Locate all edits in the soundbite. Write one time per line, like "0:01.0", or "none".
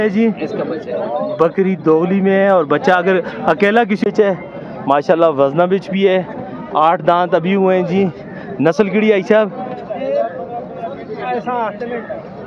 0:04.1